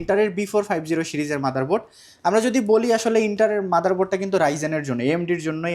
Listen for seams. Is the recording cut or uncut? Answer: uncut